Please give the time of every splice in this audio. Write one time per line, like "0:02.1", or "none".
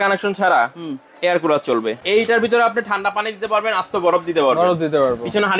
0:02.0